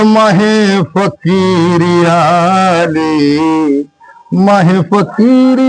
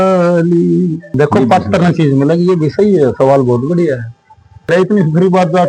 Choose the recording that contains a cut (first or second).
second